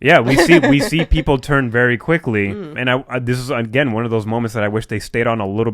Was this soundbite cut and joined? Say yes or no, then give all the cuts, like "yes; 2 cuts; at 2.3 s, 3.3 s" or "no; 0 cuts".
yes; 1 cut; at 2.8 s